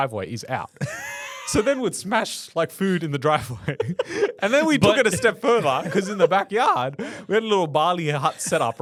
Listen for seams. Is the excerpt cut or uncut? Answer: uncut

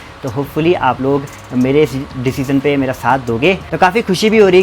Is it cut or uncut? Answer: cut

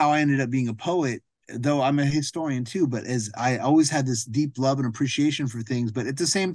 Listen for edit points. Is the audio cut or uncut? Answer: uncut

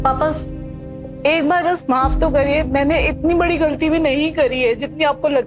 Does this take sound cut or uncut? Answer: uncut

